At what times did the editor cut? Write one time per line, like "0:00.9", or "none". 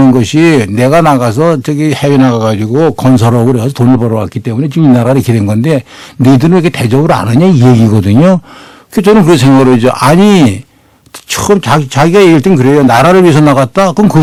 none